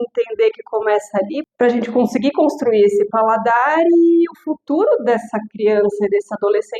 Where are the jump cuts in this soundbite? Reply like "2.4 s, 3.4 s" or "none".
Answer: 1.4 s